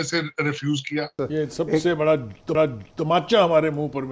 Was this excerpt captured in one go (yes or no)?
no